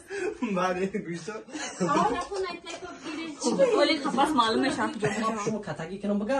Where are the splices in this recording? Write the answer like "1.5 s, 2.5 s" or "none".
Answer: 5.4 s